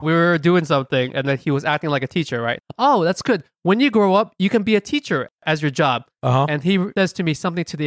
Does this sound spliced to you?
yes; 2 cuts; at 2.6 s, 6.9 s

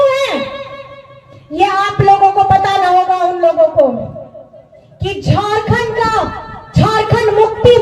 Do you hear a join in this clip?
no; 0 cuts

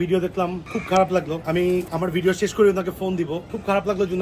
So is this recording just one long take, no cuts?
no; 1 cut; at 1.6 s

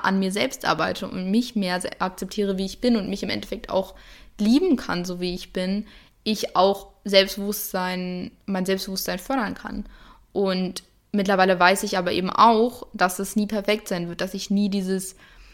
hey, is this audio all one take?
yes; 0 cuts

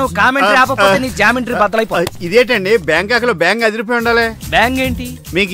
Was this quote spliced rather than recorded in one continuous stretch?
no; 0 cuts

